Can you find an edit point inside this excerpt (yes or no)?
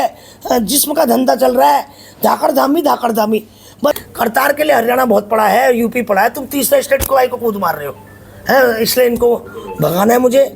yes